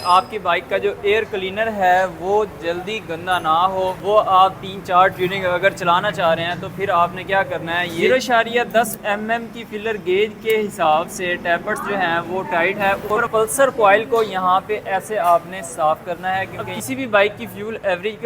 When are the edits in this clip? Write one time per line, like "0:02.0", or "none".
0:08.0
0:13.0
0:16.6